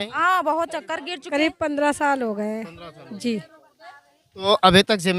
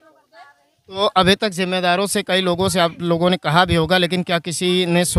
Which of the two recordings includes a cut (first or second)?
first